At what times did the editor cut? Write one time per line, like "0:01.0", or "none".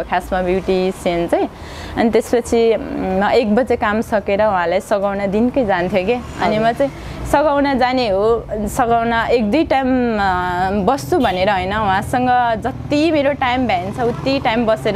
none